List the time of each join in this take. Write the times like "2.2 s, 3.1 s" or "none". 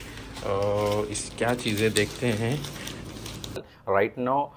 3.7 s